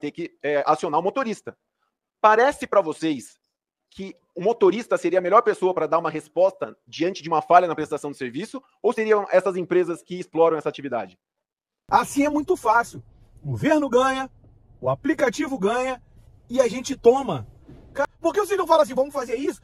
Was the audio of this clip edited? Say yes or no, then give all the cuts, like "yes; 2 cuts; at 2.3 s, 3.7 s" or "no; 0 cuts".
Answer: yes; 2 cuts; at 11.8 s, 18.0 s